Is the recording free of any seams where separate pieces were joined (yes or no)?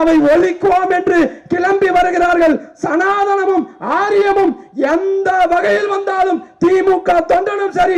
yes